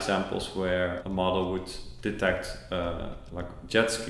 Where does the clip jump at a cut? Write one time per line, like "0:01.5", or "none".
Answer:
0:01.0